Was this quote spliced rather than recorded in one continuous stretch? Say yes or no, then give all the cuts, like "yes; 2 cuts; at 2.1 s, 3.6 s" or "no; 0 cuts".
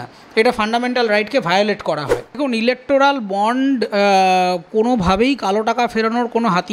yes; 1 cut; at 2.4 s